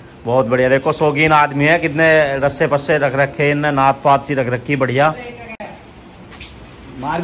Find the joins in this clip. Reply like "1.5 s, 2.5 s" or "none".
none